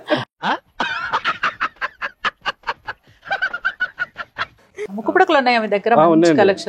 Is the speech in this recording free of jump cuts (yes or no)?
no